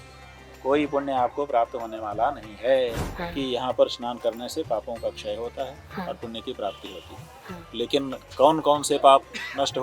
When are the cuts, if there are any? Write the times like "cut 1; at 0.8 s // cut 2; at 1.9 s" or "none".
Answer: cut 1; at 3.1 s